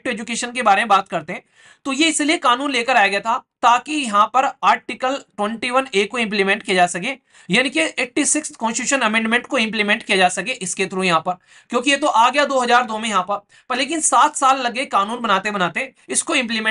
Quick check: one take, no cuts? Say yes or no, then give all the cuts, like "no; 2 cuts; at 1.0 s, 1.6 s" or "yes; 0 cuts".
yes; 0 cuts